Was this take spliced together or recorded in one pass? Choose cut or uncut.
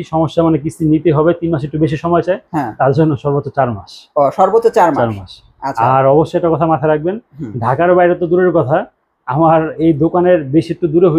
uncut